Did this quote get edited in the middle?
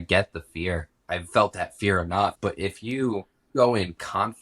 yes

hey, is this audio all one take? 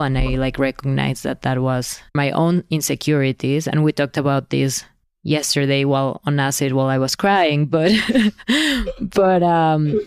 yes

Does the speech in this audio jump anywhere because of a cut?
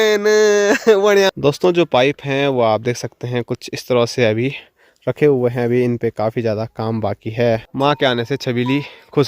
yes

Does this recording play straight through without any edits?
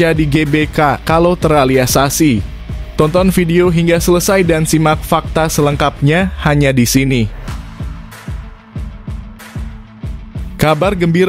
no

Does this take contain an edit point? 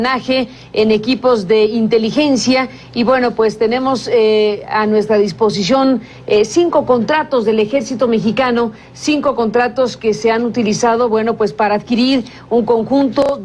no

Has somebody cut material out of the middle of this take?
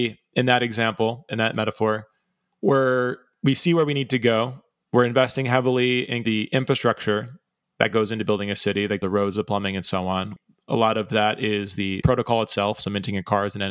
yes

